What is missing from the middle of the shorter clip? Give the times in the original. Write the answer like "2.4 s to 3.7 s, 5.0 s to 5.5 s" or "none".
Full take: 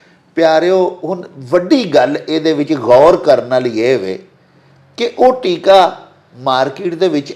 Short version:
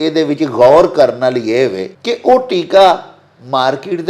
4.2 s to 4.8 s

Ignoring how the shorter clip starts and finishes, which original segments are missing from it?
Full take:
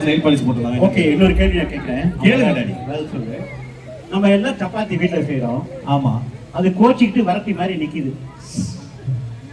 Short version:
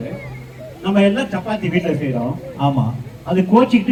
none

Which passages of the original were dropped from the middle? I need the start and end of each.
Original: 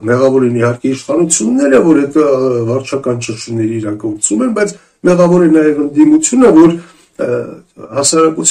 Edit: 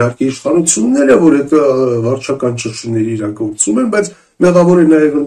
none

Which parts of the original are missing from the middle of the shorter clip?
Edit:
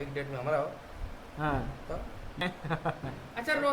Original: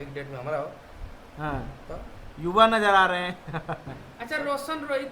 2.4 s to 3.2 s

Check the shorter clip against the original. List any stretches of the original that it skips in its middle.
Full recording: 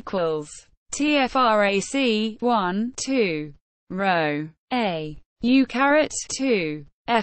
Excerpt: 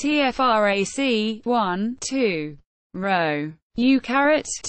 4.6 s to 5.2 s

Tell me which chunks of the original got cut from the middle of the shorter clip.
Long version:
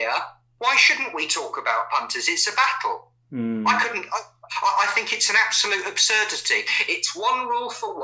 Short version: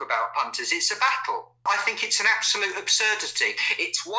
3.2 s to 4.8 s

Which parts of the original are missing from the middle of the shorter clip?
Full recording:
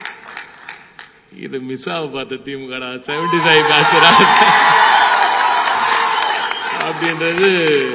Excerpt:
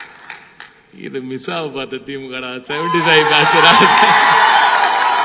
none

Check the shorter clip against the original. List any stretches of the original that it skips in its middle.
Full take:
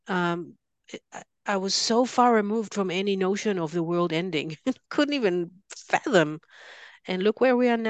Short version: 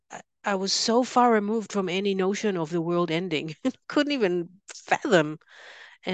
none

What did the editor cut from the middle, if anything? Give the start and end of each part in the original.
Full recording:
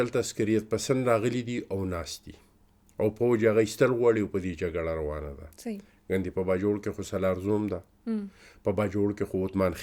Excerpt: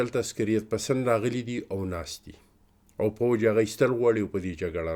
none

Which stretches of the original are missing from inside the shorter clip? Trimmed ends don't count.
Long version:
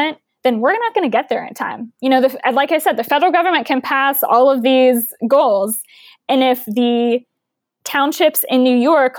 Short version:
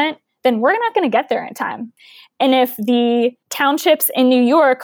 1.9 s to 5.8 s, 7.4 s to 7.8 s

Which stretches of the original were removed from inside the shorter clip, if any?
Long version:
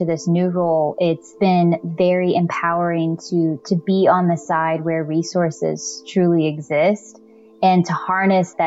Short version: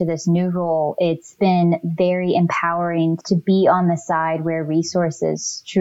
3.2 s to 3.6 s

